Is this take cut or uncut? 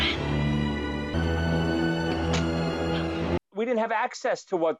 cut